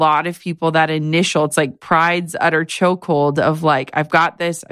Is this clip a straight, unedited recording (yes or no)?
yes